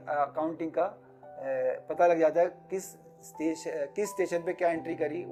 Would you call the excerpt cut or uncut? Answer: uncut